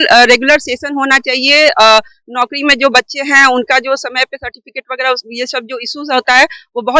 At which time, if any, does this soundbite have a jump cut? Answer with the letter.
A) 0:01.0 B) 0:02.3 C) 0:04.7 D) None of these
D